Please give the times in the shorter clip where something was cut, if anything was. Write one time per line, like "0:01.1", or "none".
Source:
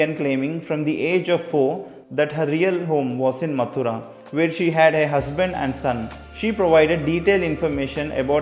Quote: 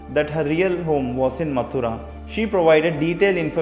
0:02.1